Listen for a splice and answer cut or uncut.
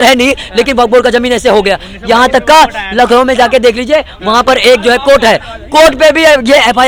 uncut